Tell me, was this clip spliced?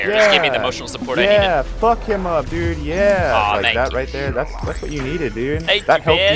no; 0 cuts

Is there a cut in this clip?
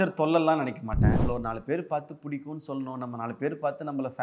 yes; 1 cut; at 1.1 s

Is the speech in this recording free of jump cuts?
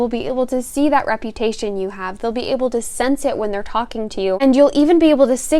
no; 1 cut; at 4.4 s

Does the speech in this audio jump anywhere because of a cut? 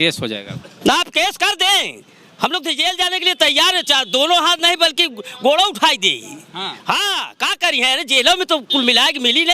no; 0 cuts

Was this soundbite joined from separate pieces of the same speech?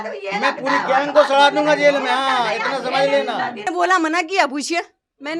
yes; 1 cut; at 3.7 s

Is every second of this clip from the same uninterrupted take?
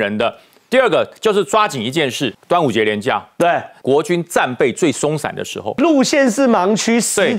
no; 3 cuts; at 2.4 s, 3.7 s, 5.8 s

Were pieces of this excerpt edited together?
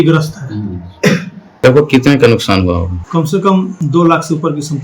yes; 3 cuts; at 1.6 s, 3.0 s, 3.8 s

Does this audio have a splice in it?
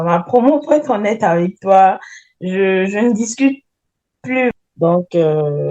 yes; 1 cut; at 4.5 s

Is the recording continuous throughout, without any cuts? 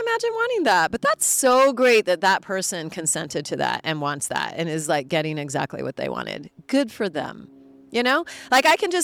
yes; 0 cuts

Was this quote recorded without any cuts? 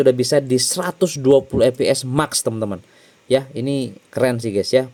yes; 0 cuts

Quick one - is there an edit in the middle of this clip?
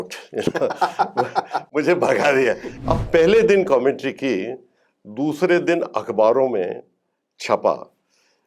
yes; 1 cut; at 2.7 s

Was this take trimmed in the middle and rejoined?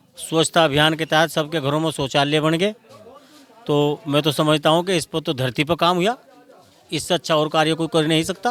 no; 0 cuts

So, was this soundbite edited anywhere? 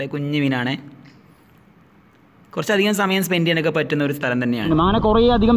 yes; 1 cut; at 4.7 s

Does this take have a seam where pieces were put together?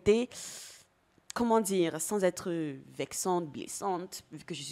no; 0 cuts

